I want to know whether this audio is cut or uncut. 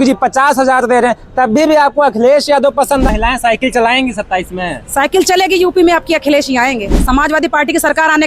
cut